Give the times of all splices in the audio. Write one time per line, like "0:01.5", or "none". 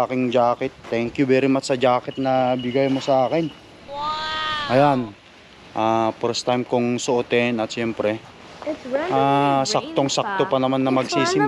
none